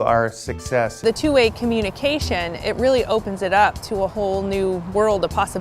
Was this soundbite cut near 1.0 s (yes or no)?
yes